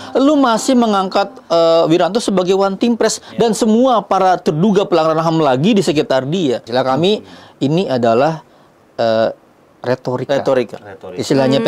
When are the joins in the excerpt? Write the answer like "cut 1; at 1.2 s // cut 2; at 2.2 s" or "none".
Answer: cut 1; at 6.7 s